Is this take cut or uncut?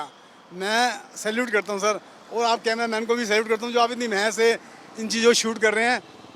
uncut